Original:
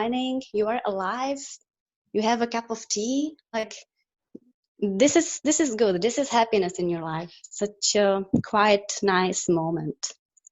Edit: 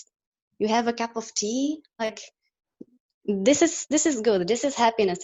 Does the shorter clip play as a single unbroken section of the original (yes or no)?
yes